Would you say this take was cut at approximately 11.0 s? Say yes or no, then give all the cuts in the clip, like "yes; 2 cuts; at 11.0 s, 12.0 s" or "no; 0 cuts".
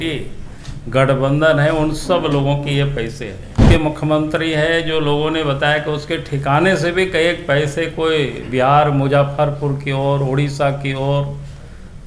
no; 1 cut; at 3.7 s